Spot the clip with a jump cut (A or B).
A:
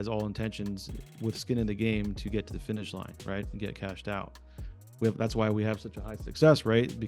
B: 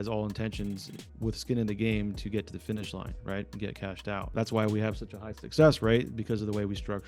B